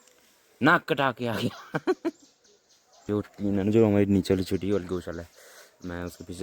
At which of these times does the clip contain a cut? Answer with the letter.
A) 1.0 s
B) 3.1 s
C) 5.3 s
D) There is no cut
B